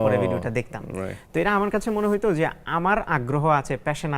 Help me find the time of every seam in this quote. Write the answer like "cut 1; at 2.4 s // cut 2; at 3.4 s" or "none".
none